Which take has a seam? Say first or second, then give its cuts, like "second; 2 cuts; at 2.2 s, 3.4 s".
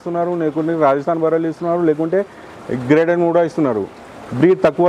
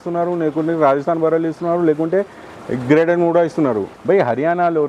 second; 1 cut; at 3.9 s